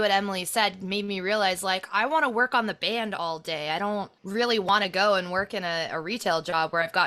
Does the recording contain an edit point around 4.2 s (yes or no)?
no